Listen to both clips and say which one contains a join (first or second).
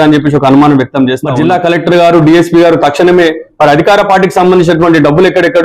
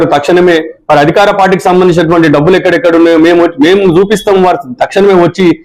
first